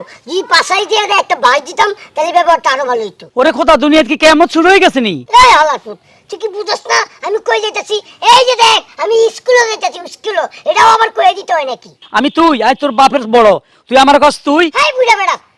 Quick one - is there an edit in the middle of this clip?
yes; 3 cuts; at 3.2 s, 5.2 s, 12.0 s

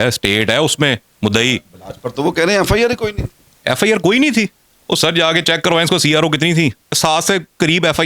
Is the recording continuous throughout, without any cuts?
no; 1 cut; at 6.9 s

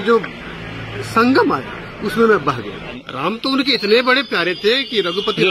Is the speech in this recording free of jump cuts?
no; 1 cut; at 3.0 s

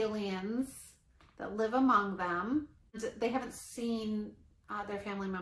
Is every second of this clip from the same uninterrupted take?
no; 1 cut; at 3.0 s

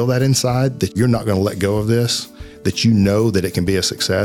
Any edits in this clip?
yes; 1 cut; at 0.9 s

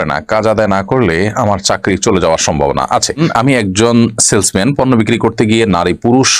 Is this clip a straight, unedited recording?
no; 1 cut; at 3.2 s

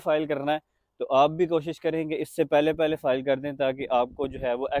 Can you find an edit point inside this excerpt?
no; 0 cuts

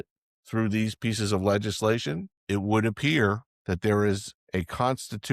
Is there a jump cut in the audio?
yes; 3 cuts; at 2.3 s, 3.5 s, 4.3 s

